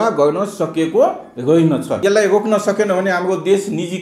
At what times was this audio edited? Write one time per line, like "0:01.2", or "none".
0:01.9